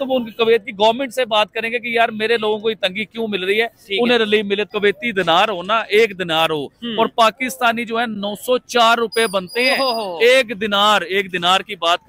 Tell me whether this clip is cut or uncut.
cut